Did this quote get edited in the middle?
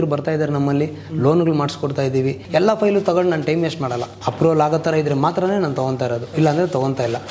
yes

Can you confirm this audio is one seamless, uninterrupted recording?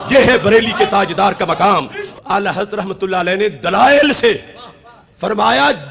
no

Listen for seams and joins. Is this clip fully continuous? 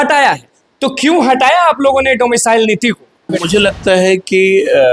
no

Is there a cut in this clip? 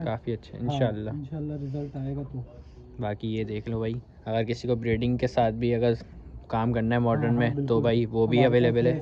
no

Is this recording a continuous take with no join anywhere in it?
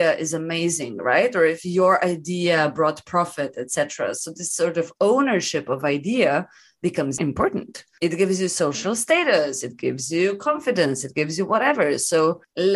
yes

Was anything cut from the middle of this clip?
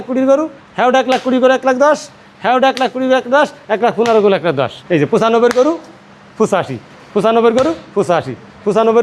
yes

